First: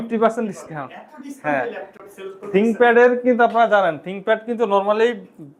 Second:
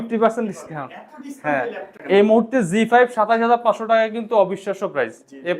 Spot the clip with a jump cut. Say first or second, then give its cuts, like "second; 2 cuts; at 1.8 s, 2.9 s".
second; 1 cut; at 1.9 s